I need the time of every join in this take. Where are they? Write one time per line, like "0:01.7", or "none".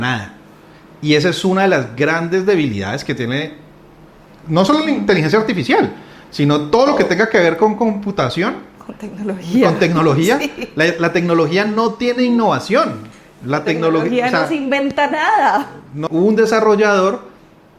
0:16.0